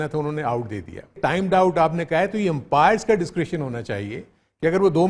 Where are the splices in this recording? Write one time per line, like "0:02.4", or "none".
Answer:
0:01.2